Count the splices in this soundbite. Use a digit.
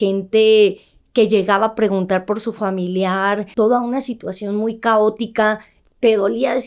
2